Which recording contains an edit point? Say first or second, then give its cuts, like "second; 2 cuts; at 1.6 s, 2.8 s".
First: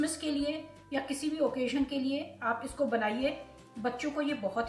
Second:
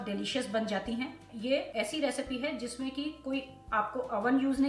second; 1 cut; at 1.3 s